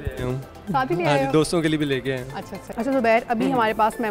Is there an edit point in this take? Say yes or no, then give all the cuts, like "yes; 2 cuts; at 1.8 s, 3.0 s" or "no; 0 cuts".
no; 0 cuts